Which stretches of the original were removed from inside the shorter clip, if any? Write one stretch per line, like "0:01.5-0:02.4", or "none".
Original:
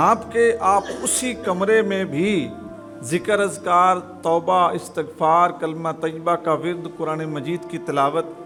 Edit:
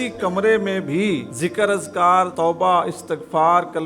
0:02.5-0:03.0
0:04.0-0:04.2